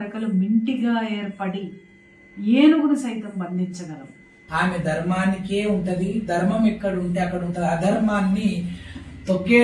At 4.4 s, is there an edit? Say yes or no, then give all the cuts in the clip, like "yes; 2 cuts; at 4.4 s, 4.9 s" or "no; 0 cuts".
yes; 1 cut; at 4.4 s